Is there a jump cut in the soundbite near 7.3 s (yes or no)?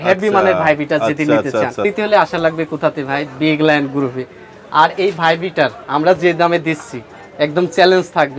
no